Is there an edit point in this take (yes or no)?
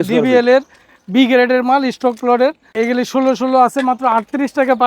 yes